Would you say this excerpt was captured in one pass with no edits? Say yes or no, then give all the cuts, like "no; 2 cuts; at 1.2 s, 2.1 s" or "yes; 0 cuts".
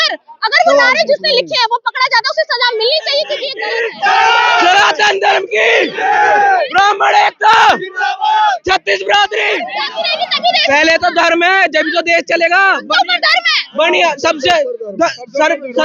no; 2 cuts; at 3.5 s, 9.8 s